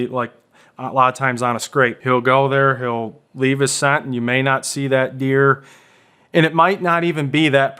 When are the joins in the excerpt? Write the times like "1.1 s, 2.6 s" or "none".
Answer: 2.0 s